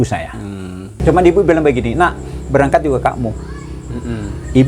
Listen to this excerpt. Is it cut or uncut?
cut